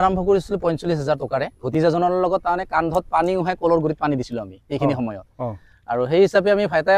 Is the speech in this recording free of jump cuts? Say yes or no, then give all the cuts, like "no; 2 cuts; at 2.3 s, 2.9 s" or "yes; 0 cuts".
no; 1 cut; at 1.6 s